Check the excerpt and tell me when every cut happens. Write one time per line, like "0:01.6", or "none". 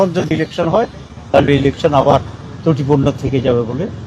none